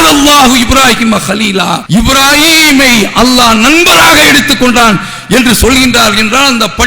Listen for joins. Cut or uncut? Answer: cut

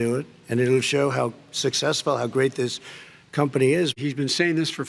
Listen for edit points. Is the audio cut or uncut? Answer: cut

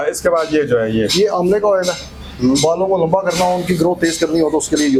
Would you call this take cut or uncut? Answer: uncut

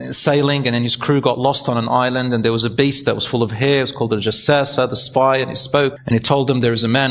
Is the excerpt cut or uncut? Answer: cut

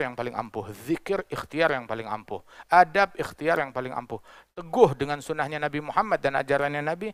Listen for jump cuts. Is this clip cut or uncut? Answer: uncut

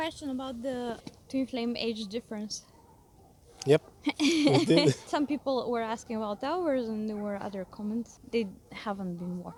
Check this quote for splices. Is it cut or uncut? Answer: uncut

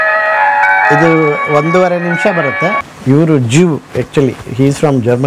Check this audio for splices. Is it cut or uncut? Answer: cut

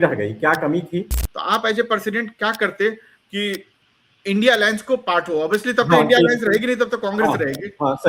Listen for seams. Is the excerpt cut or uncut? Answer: cut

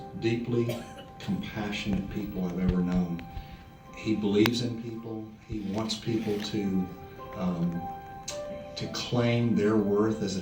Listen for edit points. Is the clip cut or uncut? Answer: uncut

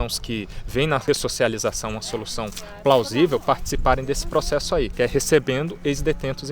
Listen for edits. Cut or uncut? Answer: cut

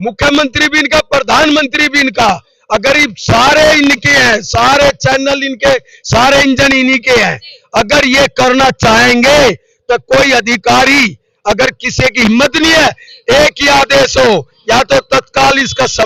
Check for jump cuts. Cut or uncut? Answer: uncut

